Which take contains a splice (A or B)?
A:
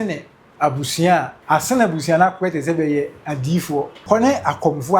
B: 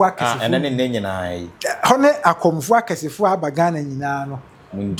A